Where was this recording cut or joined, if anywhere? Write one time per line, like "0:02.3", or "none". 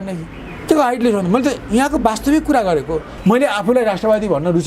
0:03.1